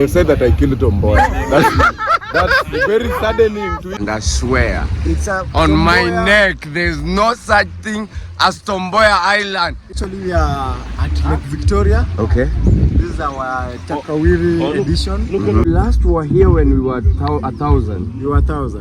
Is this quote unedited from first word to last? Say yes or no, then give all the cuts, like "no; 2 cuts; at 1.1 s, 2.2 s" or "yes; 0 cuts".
no; 3 cuts; at 4.0 s, 9.9 s, 15.7 s